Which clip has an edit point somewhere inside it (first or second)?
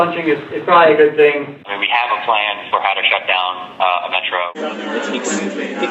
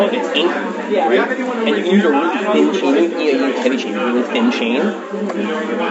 first